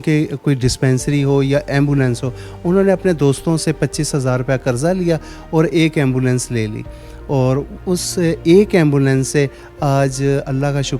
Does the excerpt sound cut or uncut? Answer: uncut